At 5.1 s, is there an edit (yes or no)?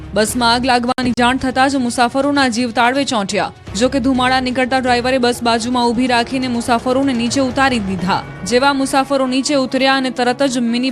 yes